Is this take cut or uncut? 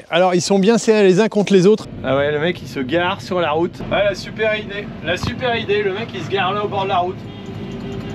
cut